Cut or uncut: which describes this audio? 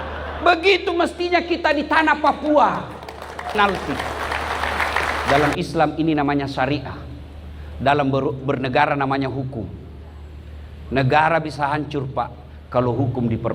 cut